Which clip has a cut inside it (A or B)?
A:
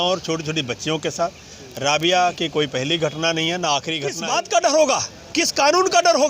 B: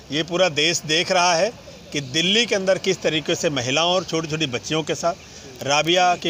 A